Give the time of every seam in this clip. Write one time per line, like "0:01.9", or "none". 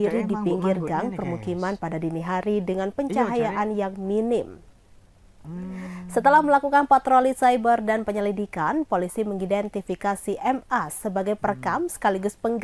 none